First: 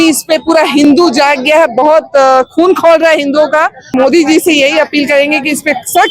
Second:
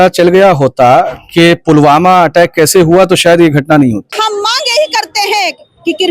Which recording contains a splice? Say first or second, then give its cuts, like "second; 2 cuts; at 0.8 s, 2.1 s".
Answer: second; 1 cut; at 4.1 s